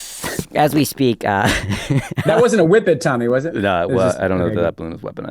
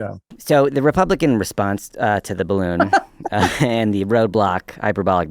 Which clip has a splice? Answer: first; 1 cut; at 2.3 s

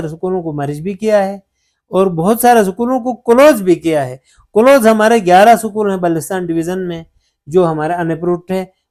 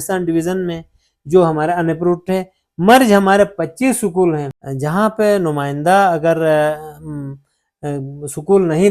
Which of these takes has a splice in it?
second; 1 cut; at 4.6 s

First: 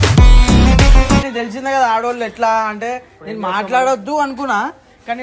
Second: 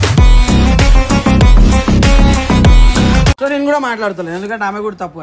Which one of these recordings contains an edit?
first; 1 cut; at 1.2 s

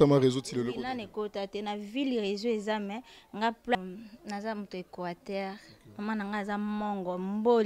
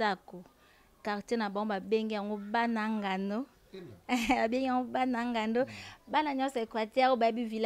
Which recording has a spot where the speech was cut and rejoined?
first; 1 cut; at 3.8 s

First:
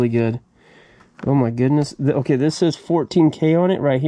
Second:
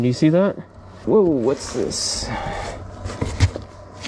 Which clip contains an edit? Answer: second; 1 cut; at 1.0 s

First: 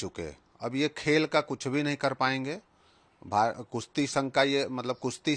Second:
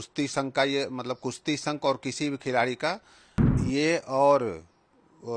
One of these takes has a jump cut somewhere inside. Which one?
second; 1 cut; at 3.5 s

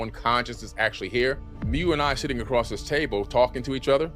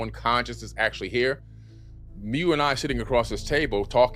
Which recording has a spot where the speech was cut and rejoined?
first; 1 cut; at 1.5 s

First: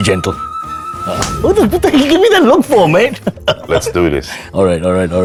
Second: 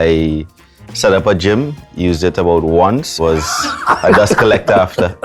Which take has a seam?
second; 1 cut; at 3.1 s

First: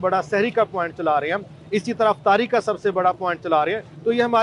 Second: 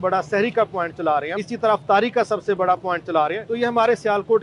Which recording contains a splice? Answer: second; 2 cuts; at 1.4 s, 3.4 s

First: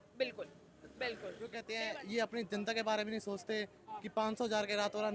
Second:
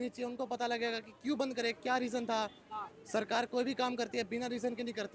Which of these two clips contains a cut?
first; 1 cut; at 1.7 s

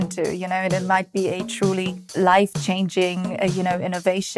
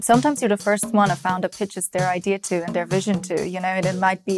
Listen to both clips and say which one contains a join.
first; 1 cut; at 2.2 s

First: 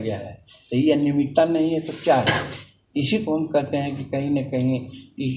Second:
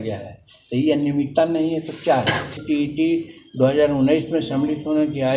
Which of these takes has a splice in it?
second; 1 cut; at 2.6 s

